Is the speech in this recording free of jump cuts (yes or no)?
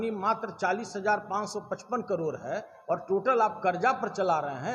yes